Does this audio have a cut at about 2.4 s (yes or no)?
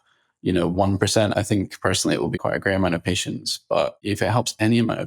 yes